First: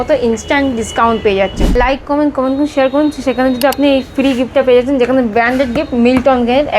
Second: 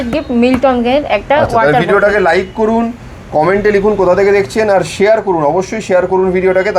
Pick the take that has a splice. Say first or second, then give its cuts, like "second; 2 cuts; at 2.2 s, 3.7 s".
first; 1 cut; at 1.7 s